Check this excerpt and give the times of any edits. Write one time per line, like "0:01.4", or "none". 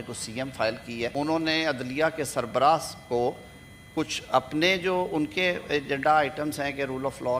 0:01.1

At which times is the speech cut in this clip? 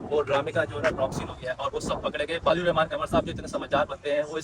0:02.5

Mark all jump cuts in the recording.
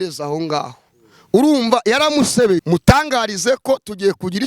0:02.6

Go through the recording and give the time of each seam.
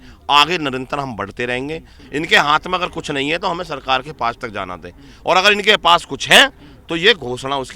0:02.0

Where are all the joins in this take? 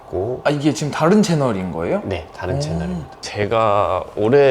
0:03.2

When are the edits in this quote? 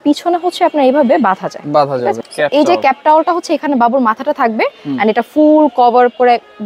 0:02.2

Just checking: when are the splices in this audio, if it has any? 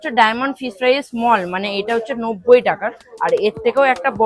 none

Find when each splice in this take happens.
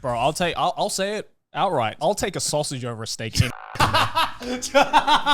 0:01.9

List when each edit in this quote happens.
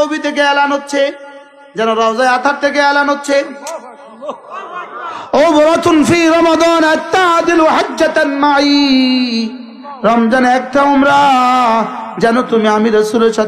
none

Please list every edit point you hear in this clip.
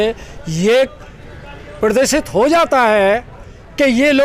none

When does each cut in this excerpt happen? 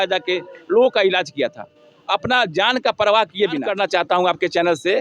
0:03.7

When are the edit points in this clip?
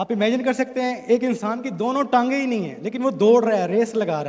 none

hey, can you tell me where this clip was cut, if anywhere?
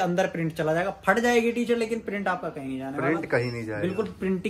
none

